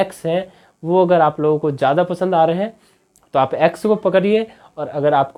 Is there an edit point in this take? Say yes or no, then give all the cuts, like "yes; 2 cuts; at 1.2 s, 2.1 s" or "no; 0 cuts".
no; 0 cuts